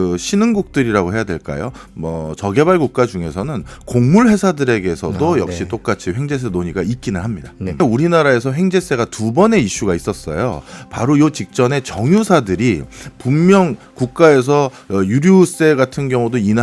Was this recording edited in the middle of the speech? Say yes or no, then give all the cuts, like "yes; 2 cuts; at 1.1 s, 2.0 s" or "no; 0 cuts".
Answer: yes; 1 cut; at 7.8 s